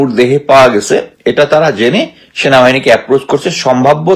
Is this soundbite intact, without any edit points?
yes; 0 cuts

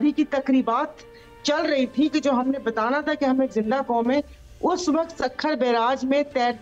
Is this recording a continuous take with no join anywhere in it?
yes; 0 cuts

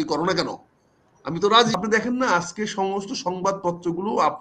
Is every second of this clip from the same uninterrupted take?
no; 1 cut; at 1.7 s

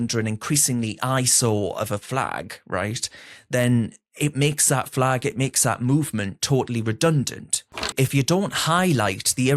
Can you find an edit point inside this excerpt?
yes; 1 cut; at 7.9 s

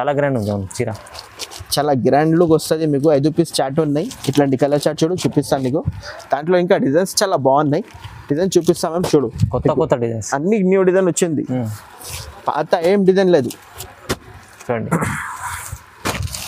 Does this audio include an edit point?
no; 0 cuts

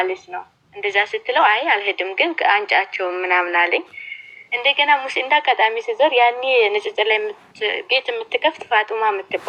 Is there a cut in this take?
no; 0 cuts

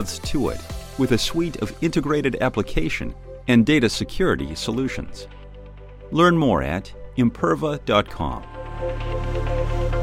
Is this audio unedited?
no; 1 cut; at 8.6 s

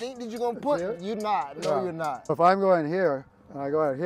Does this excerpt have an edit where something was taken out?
yes; 1 cut; at 2.3 s

